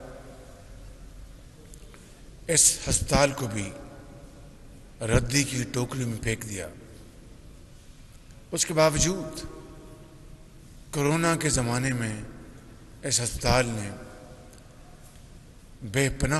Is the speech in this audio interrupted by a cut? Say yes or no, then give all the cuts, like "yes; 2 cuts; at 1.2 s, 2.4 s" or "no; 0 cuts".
no; 0 cuts